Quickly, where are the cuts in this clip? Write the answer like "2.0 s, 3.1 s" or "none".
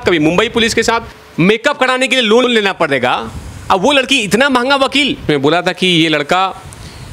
1.2 s, 5.2 s